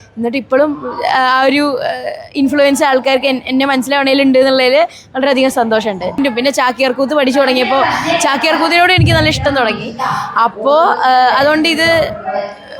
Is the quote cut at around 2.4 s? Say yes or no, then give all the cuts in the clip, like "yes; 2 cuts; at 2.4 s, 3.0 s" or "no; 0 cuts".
no; 1 cut; at 6.2 s